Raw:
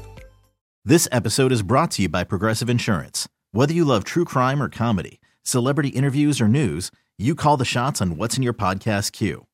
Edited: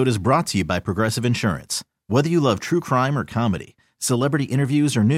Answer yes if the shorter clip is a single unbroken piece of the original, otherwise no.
yes